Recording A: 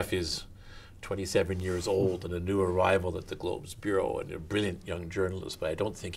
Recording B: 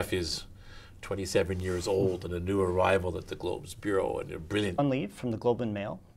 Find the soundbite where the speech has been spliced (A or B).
A